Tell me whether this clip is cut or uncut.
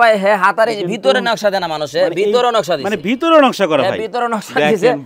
uncut